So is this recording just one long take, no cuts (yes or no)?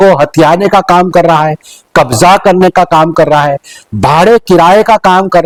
yes